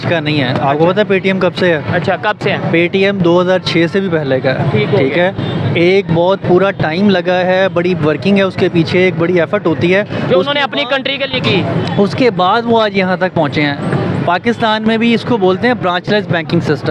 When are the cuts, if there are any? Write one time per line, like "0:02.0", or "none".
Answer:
none